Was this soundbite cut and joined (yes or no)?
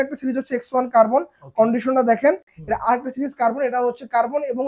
no